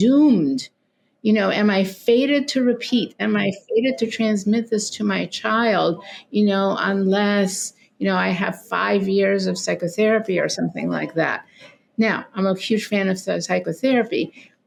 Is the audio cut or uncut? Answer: uncut